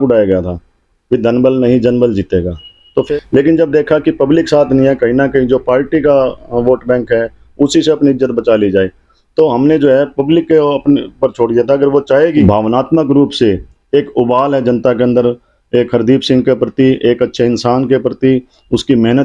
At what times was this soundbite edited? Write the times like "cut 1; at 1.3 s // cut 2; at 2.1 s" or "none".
cut 1; at 3.1 s // cut 2; at 12.4 s

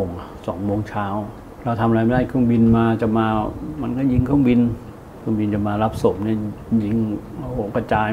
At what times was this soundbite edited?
cut 1; at 1.4 s // cut 2; at 4.9 s

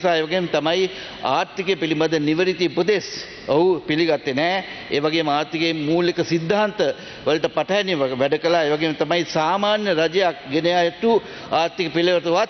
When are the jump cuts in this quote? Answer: none

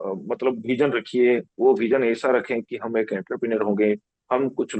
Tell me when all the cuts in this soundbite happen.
none

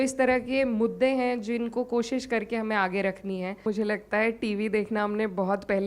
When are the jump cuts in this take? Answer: cut 1; at 3.6 s

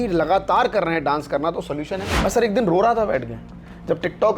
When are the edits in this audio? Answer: cut 1; at 2.0 s

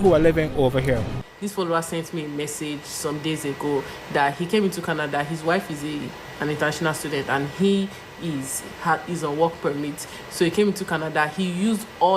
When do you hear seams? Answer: cut 1; at 1.2 s

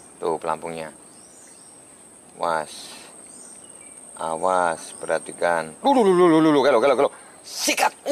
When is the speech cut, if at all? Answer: none

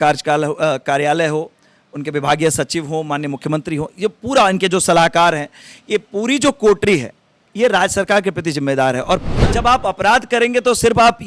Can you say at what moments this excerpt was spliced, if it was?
cut 1; at 9.3 s

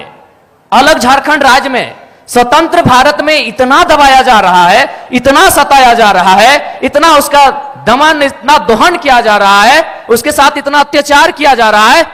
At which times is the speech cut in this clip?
none

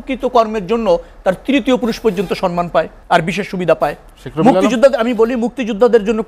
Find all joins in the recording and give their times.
cut 1; at 3.0 s

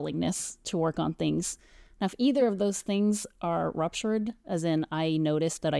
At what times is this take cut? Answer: none

